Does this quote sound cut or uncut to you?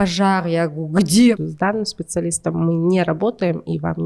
cut